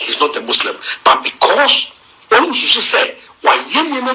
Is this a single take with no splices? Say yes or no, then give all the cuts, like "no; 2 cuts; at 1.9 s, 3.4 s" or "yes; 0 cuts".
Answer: yes; 0 cuts